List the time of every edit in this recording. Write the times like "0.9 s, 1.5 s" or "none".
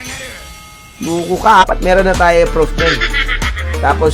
1.6 s